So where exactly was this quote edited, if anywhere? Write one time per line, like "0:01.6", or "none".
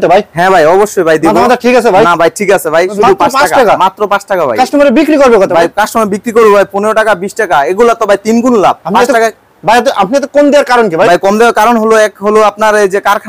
none